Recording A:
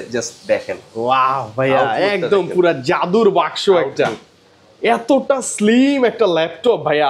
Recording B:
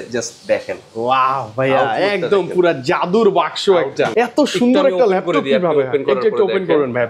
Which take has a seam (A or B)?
B